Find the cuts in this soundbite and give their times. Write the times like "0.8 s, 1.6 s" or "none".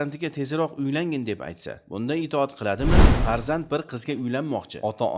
3.1 s